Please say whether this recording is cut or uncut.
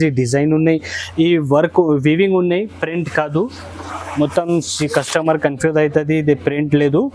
uncut